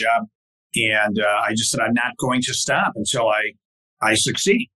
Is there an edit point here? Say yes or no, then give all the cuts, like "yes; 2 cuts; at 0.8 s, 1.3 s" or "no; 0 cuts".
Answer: no; 0 cuts